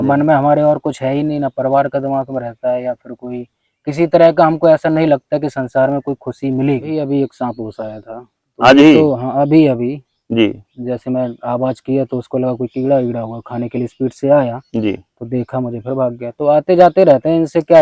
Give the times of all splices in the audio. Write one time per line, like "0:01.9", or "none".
0:07.0